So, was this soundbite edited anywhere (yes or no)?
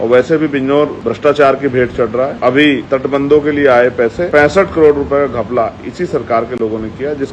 yes